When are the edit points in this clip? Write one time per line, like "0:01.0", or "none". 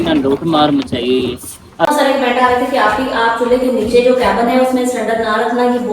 0:01.9